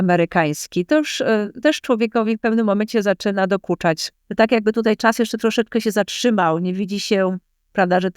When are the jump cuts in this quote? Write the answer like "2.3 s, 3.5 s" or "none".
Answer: 4.1 s

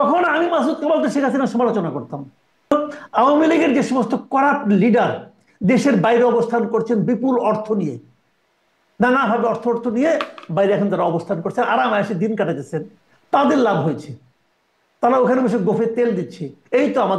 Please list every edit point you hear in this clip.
2.7 s

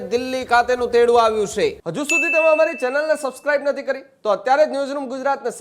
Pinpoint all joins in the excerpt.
1.9 s

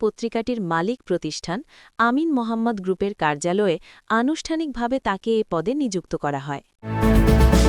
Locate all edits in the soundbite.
6.8 s

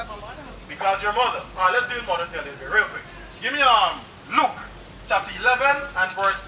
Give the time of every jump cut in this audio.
none

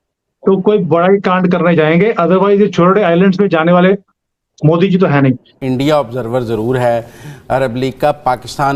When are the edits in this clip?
5.5 s

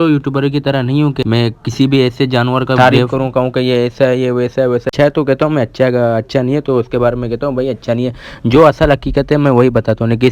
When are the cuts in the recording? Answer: 1.2 s, 2.6 s, 4.9 s

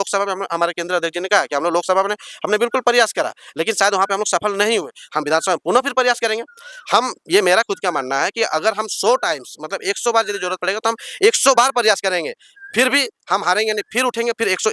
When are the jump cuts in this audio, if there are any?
none

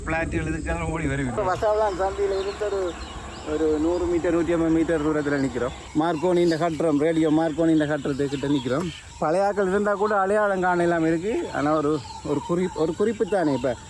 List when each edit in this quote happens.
1.4 s, 5.8 s, 9.0 s

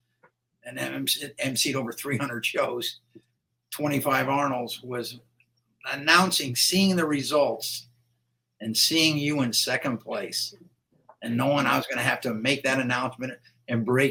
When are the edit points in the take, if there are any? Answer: none

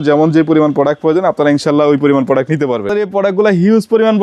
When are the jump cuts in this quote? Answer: 2.9 s

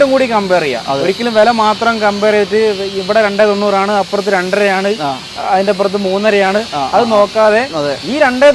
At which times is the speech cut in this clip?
none

